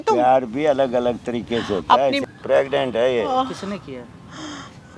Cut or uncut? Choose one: cut